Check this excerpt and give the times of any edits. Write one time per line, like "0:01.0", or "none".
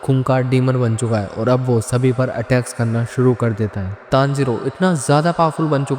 0:04.0